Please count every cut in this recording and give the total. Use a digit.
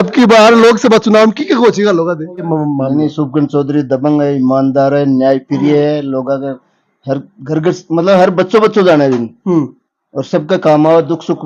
1